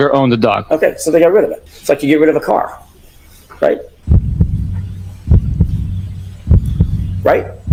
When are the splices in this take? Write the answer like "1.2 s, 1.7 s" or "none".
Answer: none